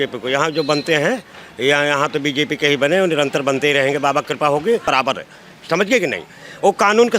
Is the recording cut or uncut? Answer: cut